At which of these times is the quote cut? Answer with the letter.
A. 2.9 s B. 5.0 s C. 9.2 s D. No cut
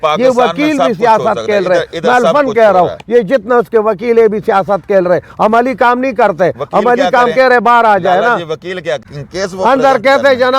C